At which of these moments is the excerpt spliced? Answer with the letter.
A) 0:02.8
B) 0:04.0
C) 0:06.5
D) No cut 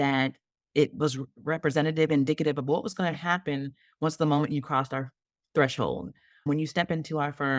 C